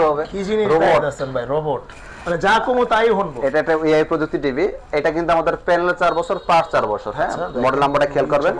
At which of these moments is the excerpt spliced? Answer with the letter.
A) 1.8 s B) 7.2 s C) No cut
C